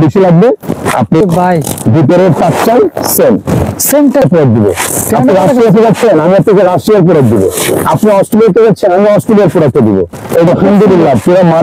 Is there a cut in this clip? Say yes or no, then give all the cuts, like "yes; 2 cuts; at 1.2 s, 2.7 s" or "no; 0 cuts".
yes; 3 cuts; at 1.2 s, 4.2 s, 10.5 s